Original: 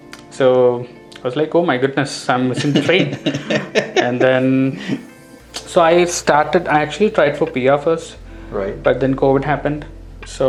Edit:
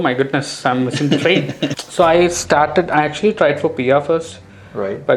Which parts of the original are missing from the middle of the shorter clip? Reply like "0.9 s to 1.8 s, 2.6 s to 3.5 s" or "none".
3.3 s to 5.5 s